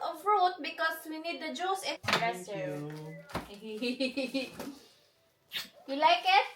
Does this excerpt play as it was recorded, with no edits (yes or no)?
no